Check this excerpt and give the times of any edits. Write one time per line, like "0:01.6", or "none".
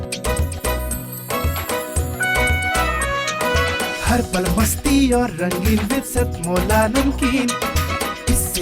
none